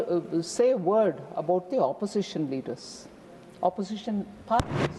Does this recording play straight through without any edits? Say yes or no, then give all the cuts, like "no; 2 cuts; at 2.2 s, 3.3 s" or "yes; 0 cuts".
yes; 0 cuts